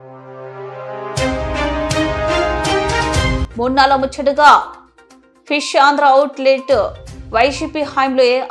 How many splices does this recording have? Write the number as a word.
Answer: one